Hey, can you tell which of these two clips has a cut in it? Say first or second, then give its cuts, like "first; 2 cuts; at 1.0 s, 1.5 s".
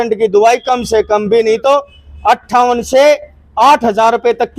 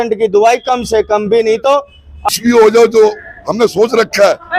second; 1 cut; at 2.3 s